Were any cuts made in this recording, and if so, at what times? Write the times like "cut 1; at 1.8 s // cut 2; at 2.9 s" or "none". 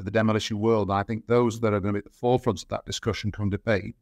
none